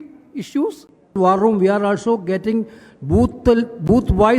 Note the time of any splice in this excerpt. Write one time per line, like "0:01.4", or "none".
0:01.2